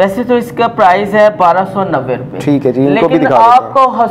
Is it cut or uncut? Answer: uncut